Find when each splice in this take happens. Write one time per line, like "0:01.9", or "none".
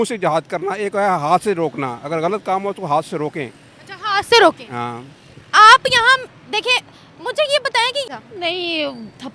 0:08.1